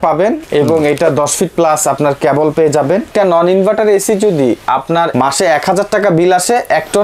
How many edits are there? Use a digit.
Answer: 1